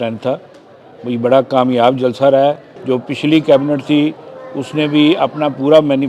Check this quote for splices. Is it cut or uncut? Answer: cut